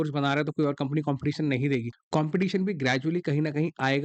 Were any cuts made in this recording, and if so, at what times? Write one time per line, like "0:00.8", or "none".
0:02.0